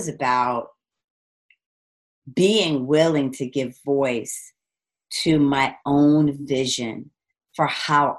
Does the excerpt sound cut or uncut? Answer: uncut